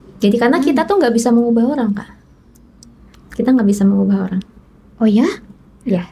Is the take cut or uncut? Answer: uncut